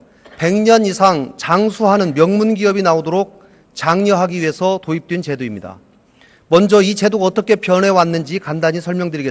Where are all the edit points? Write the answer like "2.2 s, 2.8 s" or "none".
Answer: 2.0 s

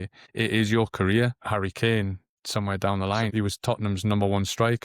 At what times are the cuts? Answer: 1.4 s, 2.3 s, 3.3 s

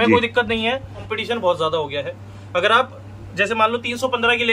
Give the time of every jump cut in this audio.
1.1 s

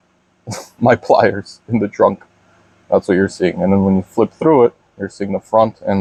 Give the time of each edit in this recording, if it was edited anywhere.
none

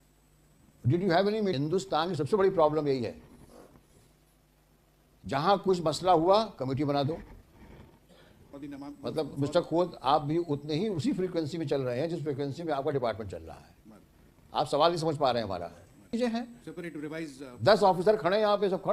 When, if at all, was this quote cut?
1.6 s, 8.4 s, 16.2 s

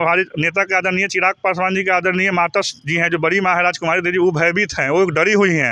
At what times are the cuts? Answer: none

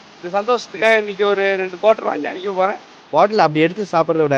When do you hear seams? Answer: 2.9 s

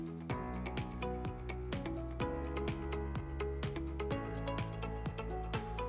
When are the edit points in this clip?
none

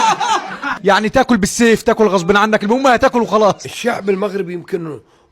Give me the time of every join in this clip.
0.7 s, 3.7 s

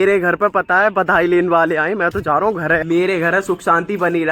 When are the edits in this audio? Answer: 2.8 s

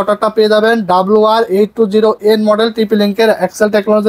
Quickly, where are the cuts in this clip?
none

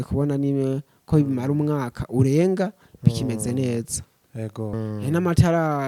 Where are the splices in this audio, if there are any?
4.7 s

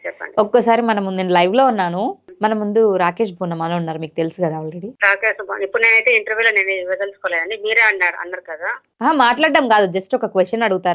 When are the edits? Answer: 2.2 s, 4.9 s

